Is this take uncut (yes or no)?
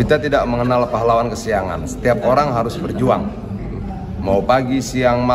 yes